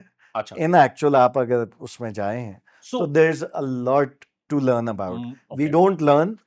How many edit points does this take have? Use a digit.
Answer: 0